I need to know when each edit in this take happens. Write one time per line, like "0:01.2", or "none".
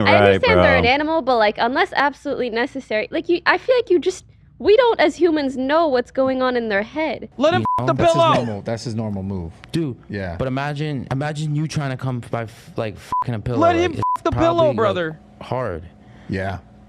0:07.2

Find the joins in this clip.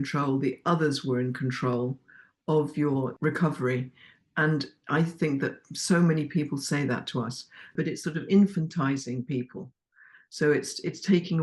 0:03.1
0:07.7

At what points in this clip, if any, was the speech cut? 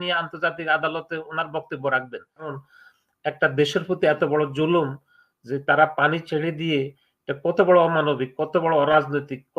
0:02.6

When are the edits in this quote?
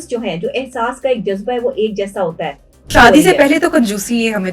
0:02.8

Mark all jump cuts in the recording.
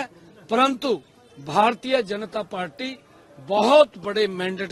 none

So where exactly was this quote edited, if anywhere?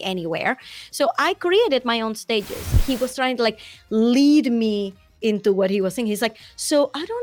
0:02.8

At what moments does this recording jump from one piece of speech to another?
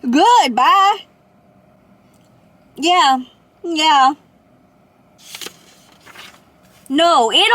none

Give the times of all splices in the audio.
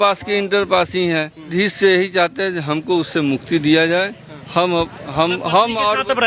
0:01.5

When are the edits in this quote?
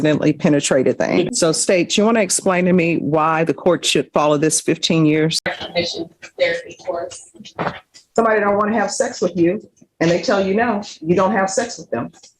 0:01.3
0:05.5

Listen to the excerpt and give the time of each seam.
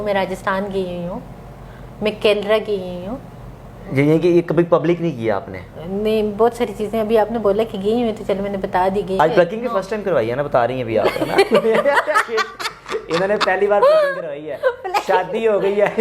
0:09.2

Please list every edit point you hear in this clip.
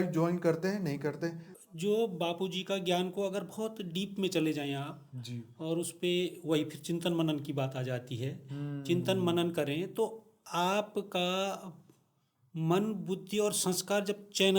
0:01.5

